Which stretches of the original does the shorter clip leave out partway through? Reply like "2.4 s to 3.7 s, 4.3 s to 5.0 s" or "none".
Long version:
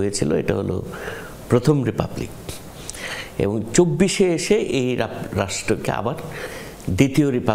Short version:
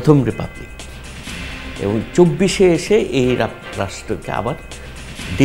none